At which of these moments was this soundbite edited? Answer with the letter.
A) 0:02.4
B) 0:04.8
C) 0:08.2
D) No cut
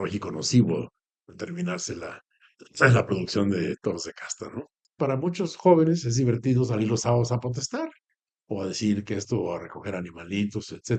B